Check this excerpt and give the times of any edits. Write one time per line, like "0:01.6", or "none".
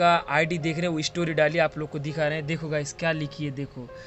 none